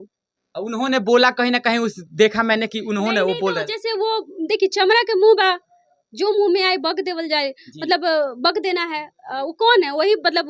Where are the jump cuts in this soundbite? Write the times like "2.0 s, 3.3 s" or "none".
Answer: none